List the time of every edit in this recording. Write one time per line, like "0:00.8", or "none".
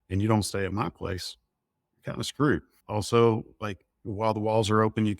0:02.8